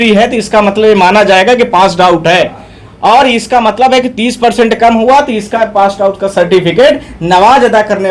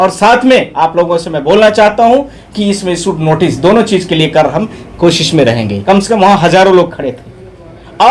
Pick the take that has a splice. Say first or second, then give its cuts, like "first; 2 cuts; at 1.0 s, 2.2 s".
second; 1 cut; at 5.7 s